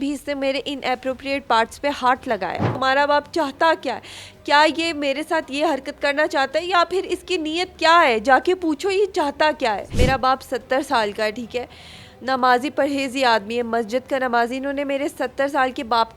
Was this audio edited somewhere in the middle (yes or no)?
yes